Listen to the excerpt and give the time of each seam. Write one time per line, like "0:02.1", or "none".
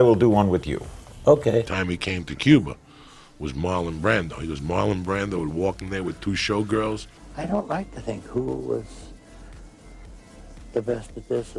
0:01.7